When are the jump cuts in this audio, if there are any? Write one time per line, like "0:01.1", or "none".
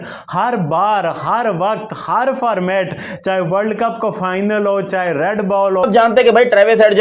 0:05.8

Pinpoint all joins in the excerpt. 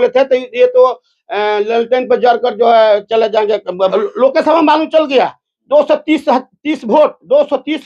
0:03.9

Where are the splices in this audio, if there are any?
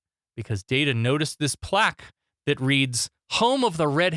none

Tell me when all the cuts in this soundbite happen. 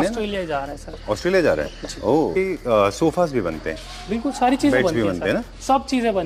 0:02.4

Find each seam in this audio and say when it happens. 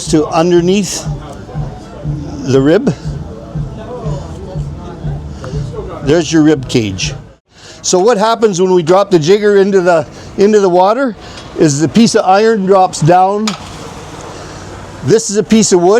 0:07.6

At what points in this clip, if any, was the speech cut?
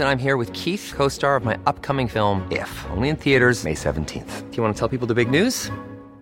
none

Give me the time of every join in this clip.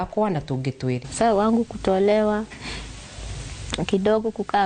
0:01.1

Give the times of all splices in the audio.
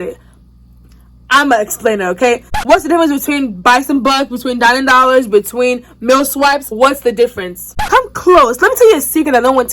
0:02.6
0:06.7
0:07.9

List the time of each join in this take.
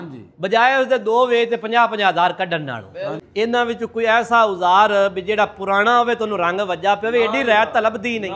0:03.2

